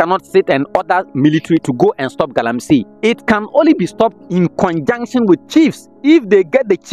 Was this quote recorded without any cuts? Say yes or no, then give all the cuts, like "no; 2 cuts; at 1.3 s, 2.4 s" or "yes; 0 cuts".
no; 2 cuts; at 2.9 s, 5.9 s